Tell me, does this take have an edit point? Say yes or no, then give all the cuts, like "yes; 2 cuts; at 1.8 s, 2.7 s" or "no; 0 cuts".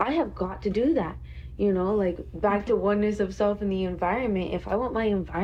no; 0 cuts